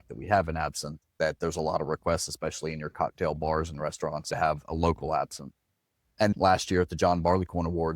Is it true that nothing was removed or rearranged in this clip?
no; 2 cuts; at 4.3 s, 6.2 s

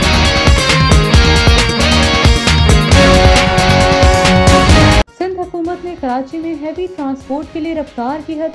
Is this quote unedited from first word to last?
yes; 0 cuts

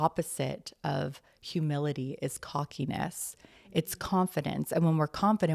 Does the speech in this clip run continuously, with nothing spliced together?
yes; 0 cuts

